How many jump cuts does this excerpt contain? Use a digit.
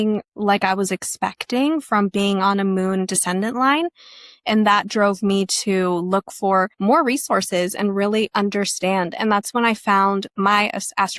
1